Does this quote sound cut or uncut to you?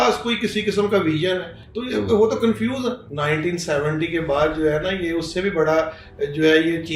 cut